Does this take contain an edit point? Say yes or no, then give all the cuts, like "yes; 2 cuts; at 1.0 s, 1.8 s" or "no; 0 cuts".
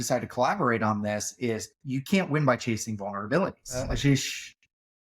yes; 1 cut; at 3.8 s